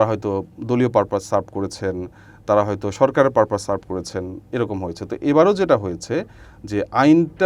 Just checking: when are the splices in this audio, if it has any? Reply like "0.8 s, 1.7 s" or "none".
none